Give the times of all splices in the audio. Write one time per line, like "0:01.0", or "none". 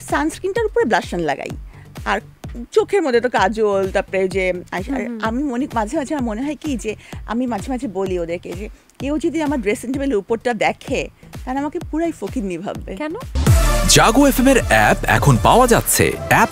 0:13.3